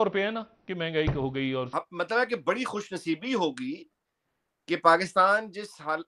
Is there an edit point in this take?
yes; 1 cut; at 1.7 s

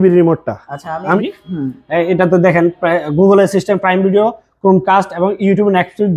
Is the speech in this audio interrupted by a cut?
yes; 1 cut; at 1.2 s

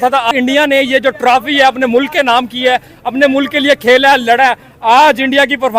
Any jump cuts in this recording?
no; 0 cuts

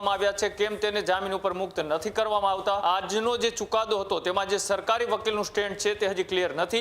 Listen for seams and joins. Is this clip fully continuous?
no; 1 cut; at 2.8 s

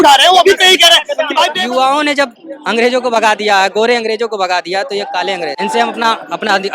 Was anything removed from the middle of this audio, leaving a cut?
yes; 2 cuts; at 1.5 s, 5.6 s

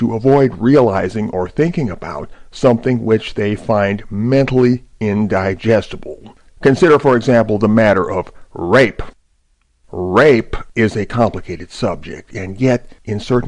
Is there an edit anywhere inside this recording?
yes; 1 cut; at 1.9 s

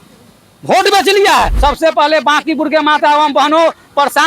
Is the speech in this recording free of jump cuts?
no; 1 cut; at 1.5 s

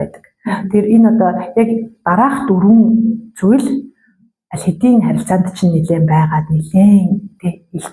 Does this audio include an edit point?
no; 0 cuts

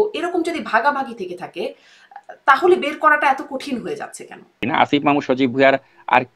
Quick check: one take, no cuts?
no; 1 cut; at 4.6 s

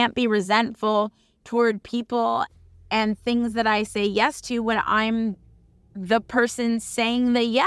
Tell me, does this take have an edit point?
yes; 1 cut; at 2.5 s

